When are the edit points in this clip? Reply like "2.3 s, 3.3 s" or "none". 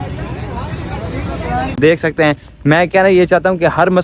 1.8 s